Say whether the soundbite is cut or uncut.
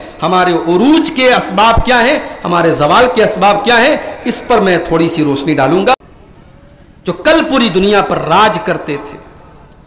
cut